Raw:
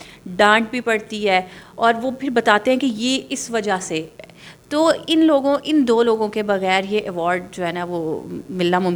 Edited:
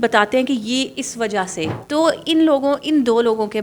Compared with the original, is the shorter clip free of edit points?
no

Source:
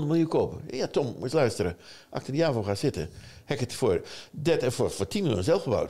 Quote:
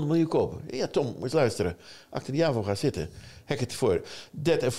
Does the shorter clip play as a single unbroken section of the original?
yes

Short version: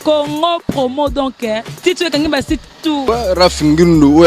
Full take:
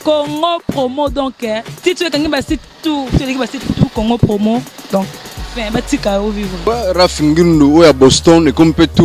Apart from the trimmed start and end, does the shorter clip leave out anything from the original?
yes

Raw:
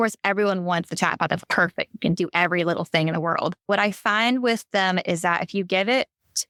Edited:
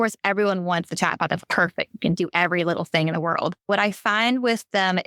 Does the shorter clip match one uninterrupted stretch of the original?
yes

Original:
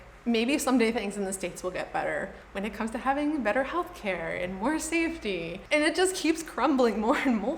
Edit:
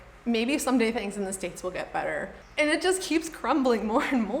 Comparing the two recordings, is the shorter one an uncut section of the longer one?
no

